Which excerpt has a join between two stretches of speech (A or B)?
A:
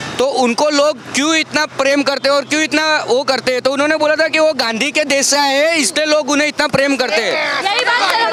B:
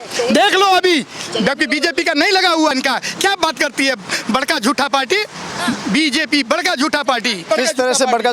B